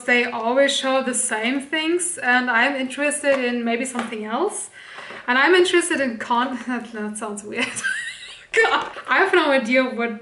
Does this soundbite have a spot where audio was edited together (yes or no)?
yes